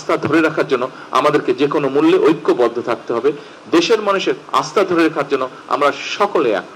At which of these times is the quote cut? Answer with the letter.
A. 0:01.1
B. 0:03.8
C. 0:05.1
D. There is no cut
D